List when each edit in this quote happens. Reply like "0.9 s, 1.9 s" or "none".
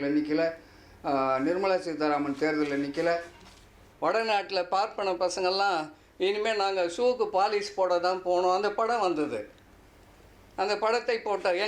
3.8 s